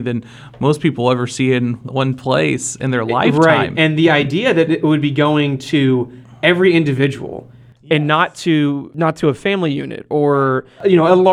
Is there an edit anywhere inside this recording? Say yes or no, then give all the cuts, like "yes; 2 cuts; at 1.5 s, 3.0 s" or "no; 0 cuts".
yes; 1 cut; at 8.9 s